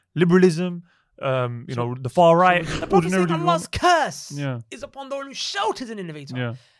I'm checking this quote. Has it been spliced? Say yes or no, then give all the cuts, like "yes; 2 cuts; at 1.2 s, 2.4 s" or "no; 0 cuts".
yes; 1 cut; at 2.7 s